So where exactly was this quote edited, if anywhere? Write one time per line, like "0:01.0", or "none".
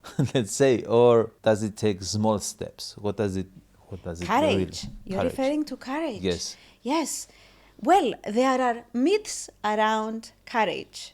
0:01.3